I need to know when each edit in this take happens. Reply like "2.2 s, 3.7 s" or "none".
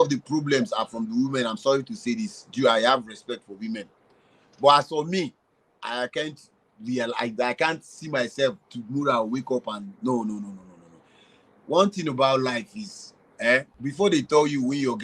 13.7 s